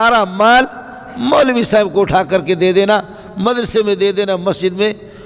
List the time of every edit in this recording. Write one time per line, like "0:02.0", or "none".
none